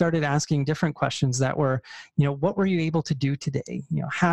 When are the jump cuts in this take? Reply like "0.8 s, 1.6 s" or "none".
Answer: none